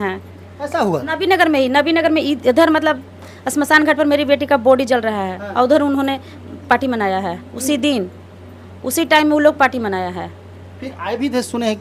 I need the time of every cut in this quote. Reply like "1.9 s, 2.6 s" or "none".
none